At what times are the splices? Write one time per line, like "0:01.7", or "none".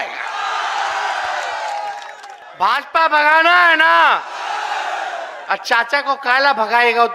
0:02.3